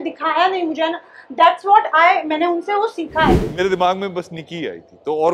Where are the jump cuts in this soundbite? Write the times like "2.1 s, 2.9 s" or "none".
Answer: 3.4 s